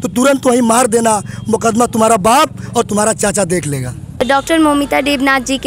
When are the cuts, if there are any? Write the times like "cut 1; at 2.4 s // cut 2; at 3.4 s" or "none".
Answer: cut 1; at 4.2 s